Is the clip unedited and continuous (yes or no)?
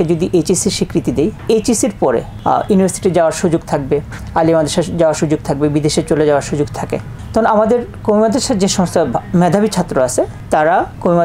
yes